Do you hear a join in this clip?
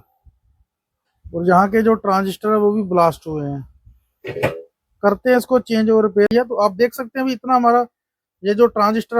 yes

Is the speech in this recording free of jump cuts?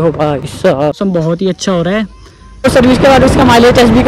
no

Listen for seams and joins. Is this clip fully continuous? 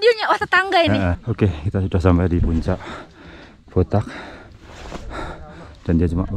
no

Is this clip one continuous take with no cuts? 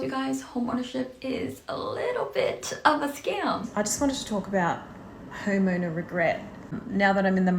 no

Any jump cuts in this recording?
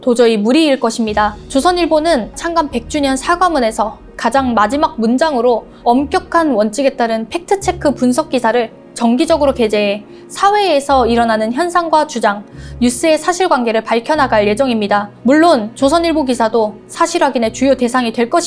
yes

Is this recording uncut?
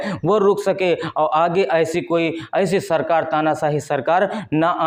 yes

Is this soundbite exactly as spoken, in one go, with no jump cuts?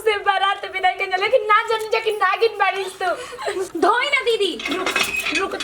no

